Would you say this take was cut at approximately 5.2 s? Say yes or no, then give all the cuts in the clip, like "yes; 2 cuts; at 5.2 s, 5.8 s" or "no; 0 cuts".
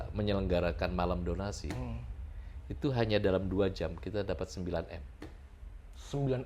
no; 0 cuts